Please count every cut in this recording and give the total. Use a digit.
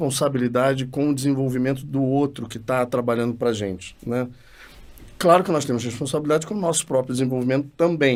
0